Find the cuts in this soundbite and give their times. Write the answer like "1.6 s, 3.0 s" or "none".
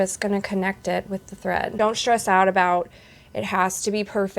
1.7 s